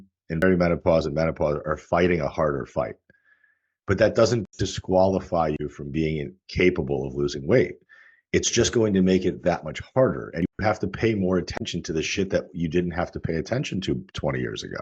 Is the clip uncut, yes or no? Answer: yes